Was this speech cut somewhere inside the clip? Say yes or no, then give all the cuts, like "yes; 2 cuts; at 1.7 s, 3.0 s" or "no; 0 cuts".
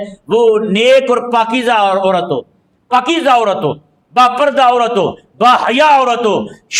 no; 0 cuts